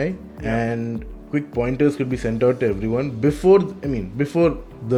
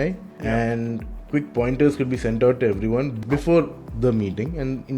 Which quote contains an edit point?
second; 1 cut; at 3.1 s

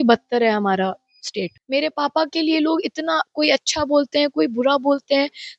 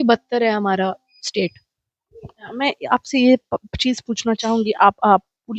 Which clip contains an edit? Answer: first; 1 cut; at 1.6 s

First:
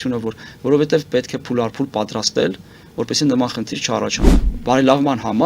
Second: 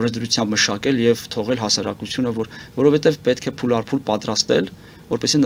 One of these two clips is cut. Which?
first; 1 cut; at 4.4 s

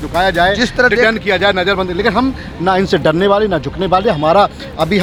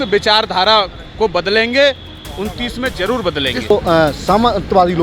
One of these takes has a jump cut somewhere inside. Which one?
second; 1 cut; at 3.7 s

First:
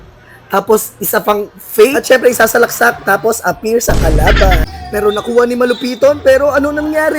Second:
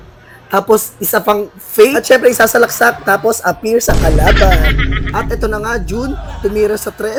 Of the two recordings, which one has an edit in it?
first; 1 cut; at 4.8 s

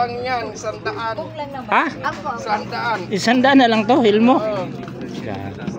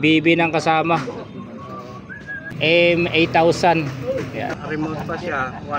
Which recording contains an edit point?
second; 2 cuts; at 2.5 s, 4.6 s

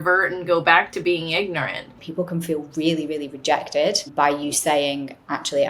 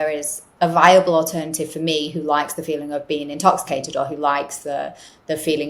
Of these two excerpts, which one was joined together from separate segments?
first; 2 cuts; at 2.0 s, 4.1 s

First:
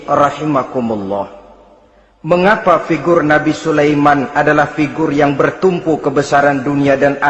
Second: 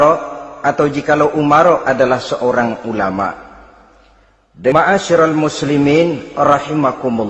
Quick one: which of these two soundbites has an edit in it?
second; 1 cut; at 4.7 s

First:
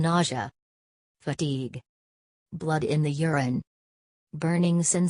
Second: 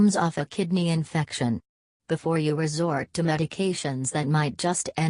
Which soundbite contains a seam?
first; 1 cut; at 2.8 s

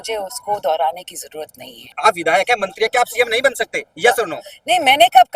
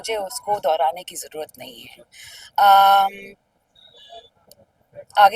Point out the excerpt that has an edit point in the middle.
first; 1 cut; at 1.8 s

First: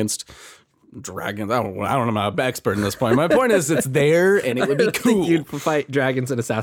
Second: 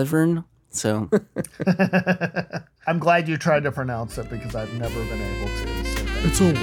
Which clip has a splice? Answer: second; 1 cut; at 1.0 s

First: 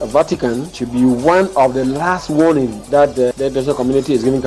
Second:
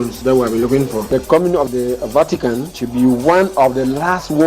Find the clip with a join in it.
second; 1 cut; at 1.0 s

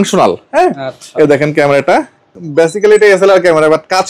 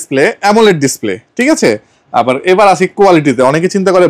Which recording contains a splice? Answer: first; 1 cut; at 2.3 s

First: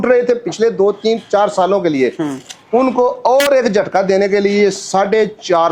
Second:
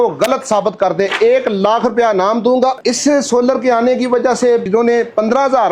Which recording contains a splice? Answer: second; 2 cuts; at 2.8 s, 4.7 s

